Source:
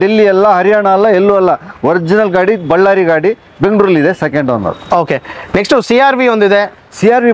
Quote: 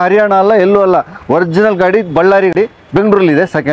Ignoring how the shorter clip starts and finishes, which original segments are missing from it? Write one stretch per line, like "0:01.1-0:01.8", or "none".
0:03.1-0:03.2